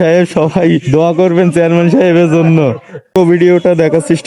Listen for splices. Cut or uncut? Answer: cut